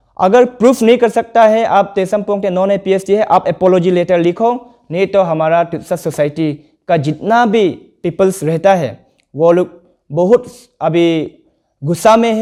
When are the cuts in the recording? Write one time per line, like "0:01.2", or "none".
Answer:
none

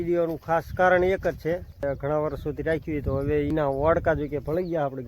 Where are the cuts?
0:03.5

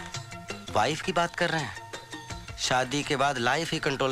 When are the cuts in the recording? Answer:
none

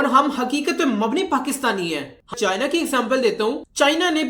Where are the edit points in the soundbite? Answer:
0:02.3

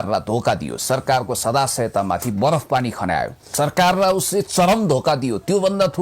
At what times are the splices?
0:03.5

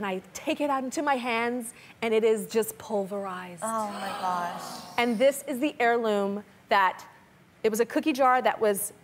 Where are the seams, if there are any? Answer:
0:07.2

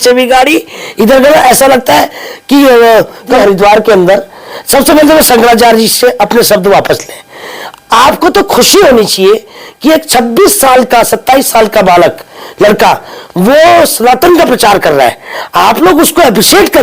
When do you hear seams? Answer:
0:03.4

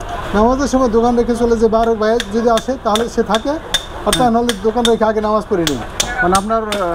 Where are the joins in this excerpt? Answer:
none

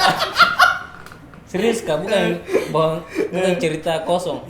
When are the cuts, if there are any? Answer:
none

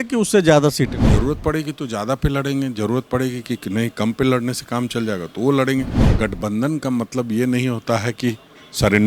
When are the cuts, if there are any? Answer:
0:01.0
0:06.0

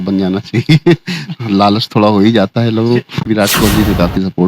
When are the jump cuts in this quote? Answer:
0:03.3

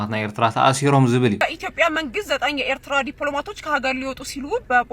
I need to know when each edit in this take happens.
0:01.4

